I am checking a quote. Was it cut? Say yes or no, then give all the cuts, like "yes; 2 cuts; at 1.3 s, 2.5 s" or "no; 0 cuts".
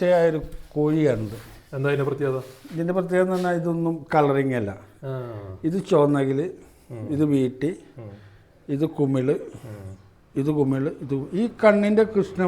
no; 0 cuts